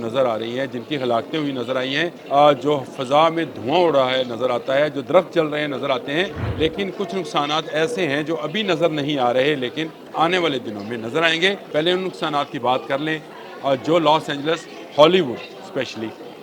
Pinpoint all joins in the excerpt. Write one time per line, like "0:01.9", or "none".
0:02.2
0:06.4
0:10.0
0:11.6

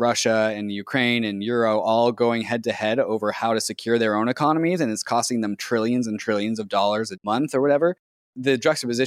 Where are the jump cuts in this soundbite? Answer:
0:07.2
0:08.3

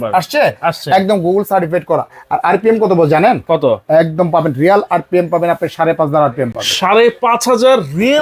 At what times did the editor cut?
none

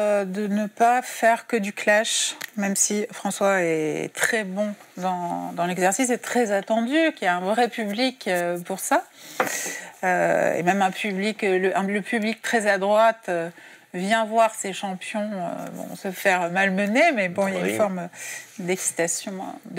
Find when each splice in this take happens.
none

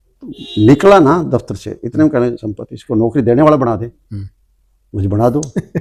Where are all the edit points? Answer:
none

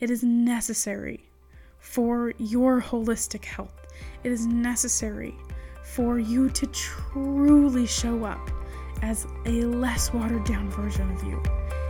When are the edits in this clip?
none

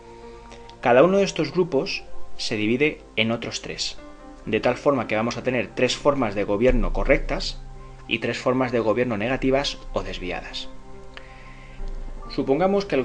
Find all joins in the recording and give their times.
0:09.6

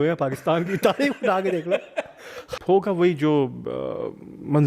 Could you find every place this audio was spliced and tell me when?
0:02.5

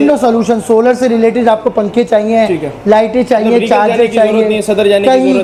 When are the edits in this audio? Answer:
none

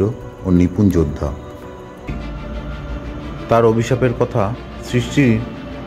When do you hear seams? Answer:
0:02.1

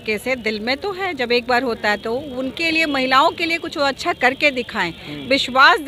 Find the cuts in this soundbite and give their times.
none

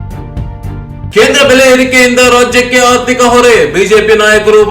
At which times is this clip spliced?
0:01.1

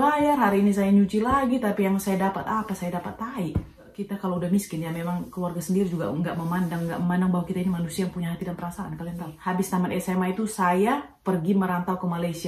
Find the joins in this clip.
0:04.0
0:09.3

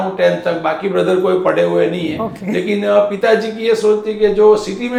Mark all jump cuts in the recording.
none

